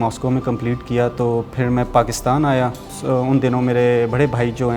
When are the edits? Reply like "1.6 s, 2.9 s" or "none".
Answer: 2.9 s